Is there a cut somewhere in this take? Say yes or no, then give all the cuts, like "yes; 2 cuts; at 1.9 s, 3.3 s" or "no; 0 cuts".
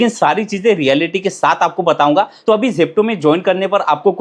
yes; 1 cut; at 2.3 s